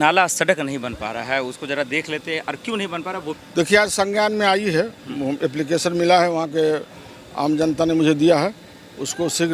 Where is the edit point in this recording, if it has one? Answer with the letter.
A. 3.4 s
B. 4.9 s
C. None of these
A